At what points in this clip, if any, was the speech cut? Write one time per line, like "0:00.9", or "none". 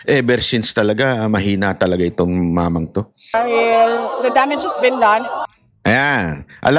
0:03.3